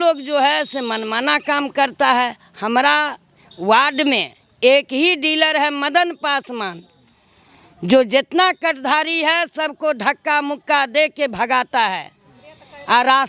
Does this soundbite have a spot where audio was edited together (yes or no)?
no